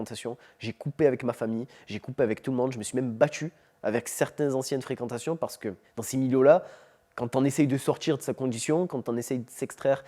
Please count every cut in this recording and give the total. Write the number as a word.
zero